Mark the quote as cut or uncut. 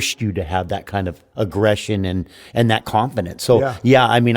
cut